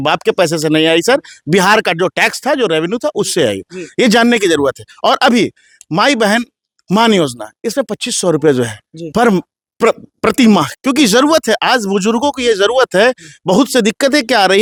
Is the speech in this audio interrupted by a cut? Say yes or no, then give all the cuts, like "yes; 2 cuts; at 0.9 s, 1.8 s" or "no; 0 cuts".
no; 0 cuts